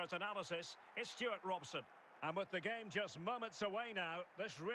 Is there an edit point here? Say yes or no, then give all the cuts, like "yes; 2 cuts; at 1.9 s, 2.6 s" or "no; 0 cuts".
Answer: yes; 1 cut; at 2.0 s